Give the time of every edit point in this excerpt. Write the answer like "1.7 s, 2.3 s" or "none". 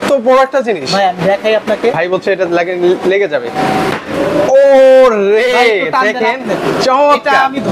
2.0 s

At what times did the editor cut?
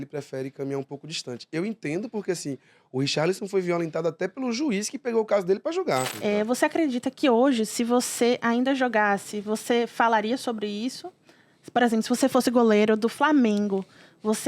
6.1 s

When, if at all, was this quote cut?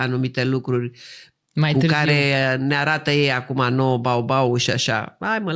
none

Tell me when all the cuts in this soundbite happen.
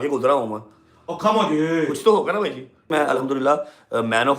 2.9 s

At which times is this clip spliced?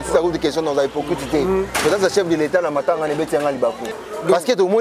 3.8 s

